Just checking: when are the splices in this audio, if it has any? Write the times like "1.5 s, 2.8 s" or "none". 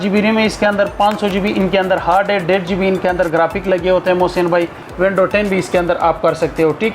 4.8 s